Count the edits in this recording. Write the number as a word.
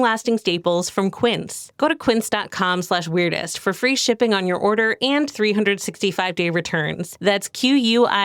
zero